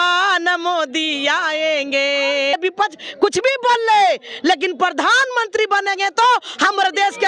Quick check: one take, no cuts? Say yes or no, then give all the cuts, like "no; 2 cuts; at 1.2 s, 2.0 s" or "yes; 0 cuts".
no; 1 cut; at 2.5 s